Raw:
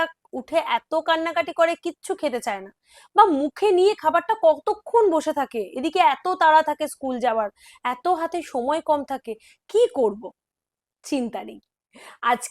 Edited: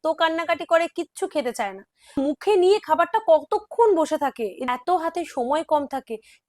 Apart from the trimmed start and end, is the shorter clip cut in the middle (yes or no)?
yes